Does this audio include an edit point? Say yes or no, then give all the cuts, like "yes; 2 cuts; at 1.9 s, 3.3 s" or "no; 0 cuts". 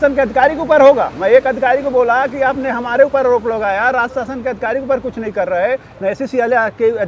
no; 0 cuts